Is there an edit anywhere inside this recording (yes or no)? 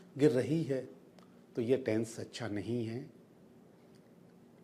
no